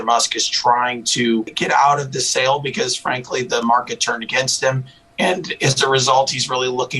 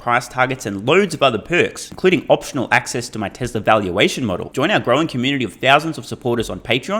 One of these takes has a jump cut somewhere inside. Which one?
first; 1 cut; at 1.5 s

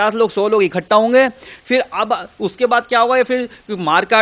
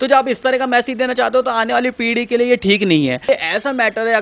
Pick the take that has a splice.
second; 1 cut; at 3.2 s

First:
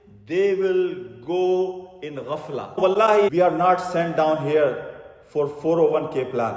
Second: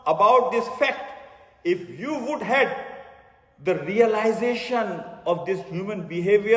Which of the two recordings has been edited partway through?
first; 1 cut; at 2.7 s

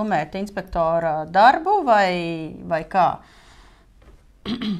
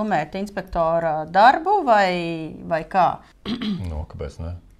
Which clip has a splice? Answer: second; 1 cut; at 3.3 s

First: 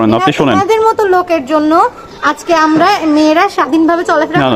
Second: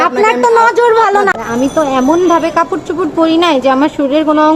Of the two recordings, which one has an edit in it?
second; 1 cut; at 1.3 s

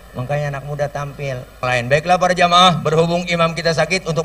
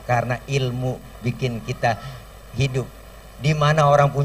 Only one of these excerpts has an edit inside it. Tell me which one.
first; 1 cut; at 1.6 s

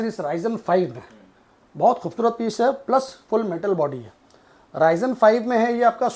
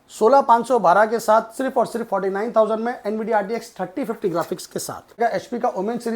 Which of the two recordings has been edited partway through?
second; 1 cut; at 5.2 s

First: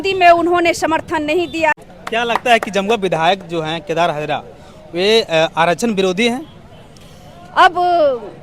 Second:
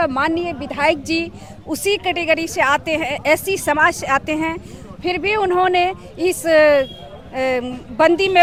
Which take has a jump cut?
first; 1 cut; at 1.9 s

